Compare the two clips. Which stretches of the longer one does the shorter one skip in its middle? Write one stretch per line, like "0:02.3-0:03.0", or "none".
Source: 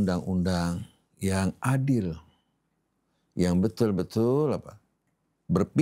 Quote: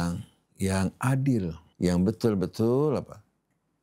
0:02.2-0:03.2